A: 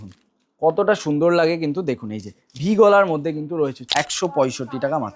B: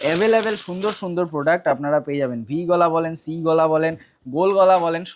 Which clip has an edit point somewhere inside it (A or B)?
A